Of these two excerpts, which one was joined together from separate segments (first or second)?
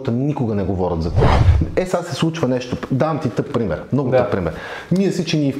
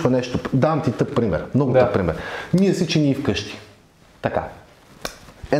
first